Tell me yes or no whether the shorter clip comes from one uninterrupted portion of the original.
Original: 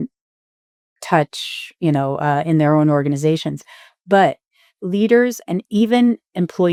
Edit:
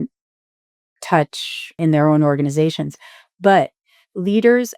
no